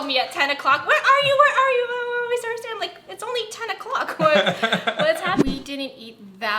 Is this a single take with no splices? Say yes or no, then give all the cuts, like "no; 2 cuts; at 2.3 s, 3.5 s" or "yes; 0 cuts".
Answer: no; 1 cut; at 5.4 s